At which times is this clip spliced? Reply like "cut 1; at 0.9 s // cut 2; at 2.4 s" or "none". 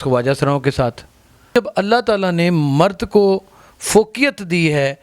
cut 1; at 1.5 s

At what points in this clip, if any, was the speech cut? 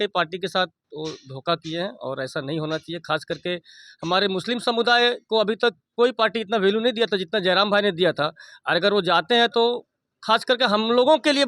none

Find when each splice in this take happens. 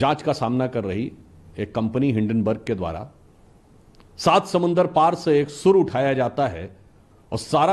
none

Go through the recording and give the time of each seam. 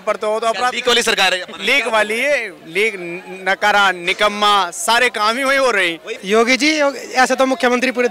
cut 1; at 6.1 s

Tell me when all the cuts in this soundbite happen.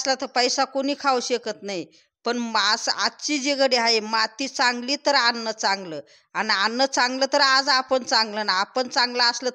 none

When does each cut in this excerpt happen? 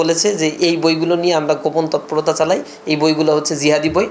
none

